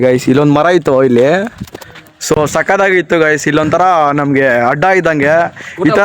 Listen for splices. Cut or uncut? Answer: uncut